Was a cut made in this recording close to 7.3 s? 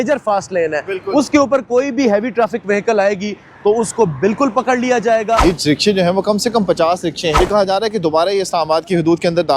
yes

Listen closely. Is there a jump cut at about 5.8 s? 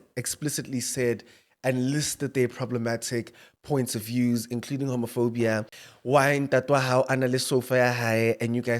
yes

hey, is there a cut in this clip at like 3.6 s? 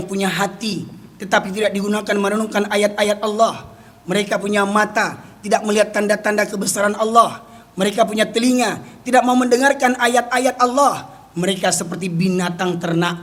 no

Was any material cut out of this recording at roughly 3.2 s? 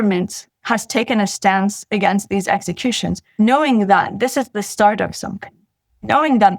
yes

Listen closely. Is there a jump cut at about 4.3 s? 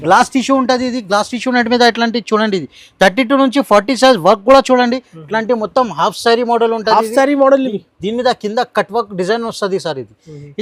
no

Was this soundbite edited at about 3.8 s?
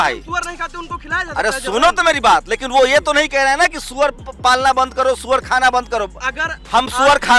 no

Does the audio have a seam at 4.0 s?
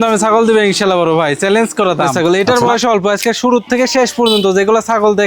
no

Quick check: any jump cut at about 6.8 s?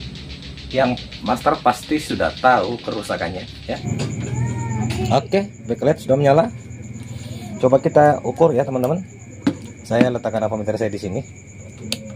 no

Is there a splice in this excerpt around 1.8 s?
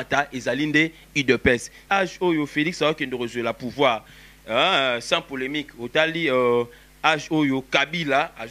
yes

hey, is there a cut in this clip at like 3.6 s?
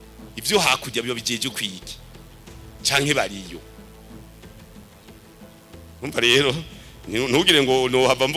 yes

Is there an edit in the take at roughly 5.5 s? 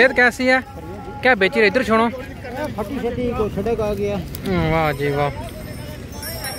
no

